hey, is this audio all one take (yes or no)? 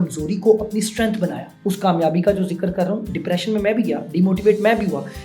no